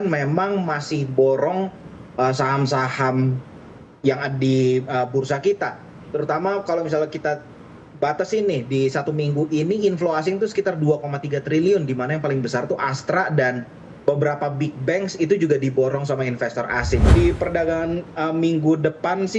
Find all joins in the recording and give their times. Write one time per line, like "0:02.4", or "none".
0:17.1